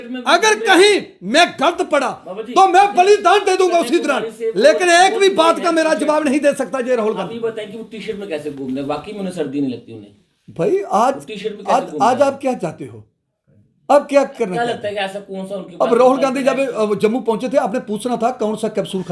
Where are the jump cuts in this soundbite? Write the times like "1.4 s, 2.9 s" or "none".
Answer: none

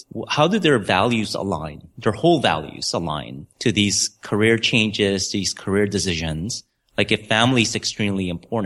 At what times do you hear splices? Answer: none

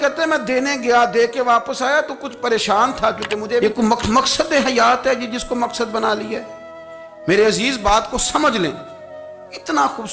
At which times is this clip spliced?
3.6 s

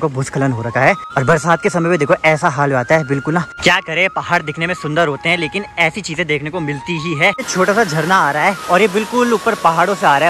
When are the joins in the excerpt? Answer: 1.1 s, 3.5 s, 7.5 s

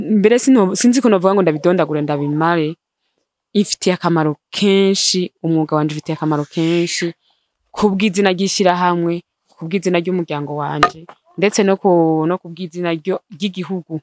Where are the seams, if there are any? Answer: none

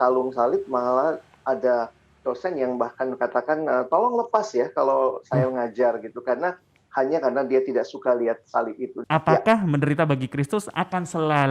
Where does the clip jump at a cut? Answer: 8.9 s

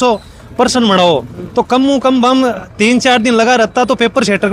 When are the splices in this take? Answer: none

